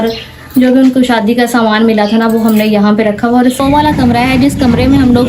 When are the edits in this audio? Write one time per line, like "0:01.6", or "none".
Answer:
0:03.6